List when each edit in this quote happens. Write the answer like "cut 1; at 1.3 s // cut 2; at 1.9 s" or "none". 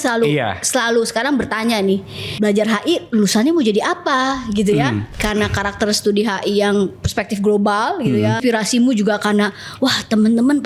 cut 1; at 2.2 s // cut 2; at 5.1 s // cut 3; at 8.4 s